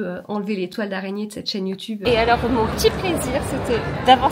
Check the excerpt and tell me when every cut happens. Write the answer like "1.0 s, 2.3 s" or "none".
2.0 s

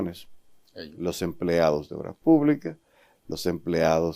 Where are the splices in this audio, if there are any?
none

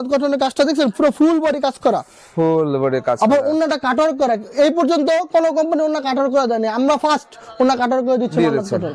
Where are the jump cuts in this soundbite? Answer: none

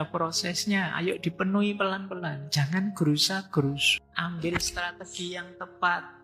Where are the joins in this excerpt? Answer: 3.9 s

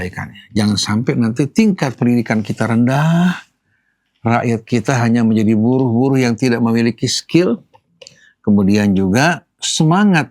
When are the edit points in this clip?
none

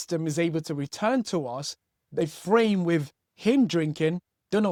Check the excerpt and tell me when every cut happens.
none

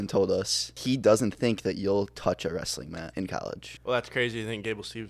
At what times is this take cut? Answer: 0.8 s, 3.4 s

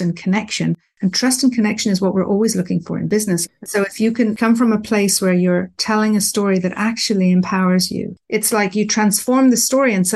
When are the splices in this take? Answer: 3.1 s, 8.1 s

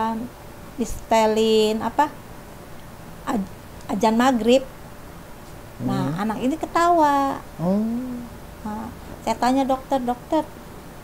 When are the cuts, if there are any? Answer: none

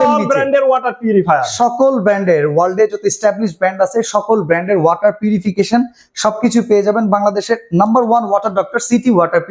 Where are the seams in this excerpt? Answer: none

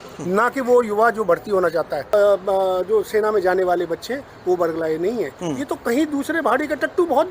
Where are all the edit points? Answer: 2.1 s

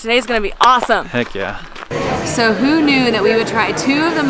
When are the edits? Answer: 1.9 s

